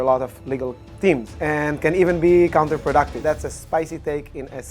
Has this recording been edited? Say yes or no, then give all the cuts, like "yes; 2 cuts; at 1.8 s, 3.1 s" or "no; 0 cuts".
yes; 2 cuts; at 1.3 s, 3.1 s